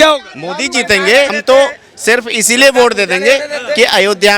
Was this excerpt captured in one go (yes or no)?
no